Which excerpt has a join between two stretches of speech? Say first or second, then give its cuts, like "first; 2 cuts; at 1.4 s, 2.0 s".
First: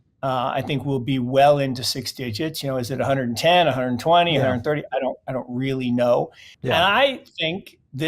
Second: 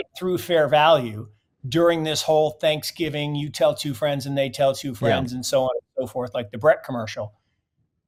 first; 1 cut; at 6.4 s